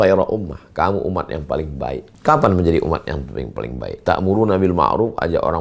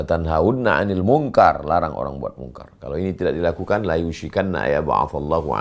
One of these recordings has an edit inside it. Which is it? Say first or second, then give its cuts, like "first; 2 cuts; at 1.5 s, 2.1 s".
first; 1 cut; at 2.1 s